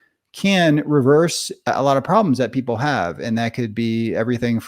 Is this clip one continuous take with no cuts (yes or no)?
yes